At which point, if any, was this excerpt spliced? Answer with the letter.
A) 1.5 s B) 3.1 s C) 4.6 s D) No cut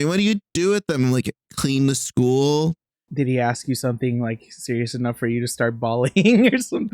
B